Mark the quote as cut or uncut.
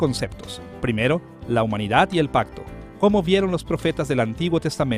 cut